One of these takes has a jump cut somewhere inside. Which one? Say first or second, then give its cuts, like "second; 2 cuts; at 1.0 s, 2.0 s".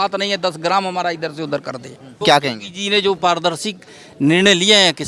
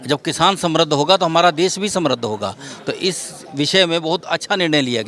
first; 1 cut; at 2.2 s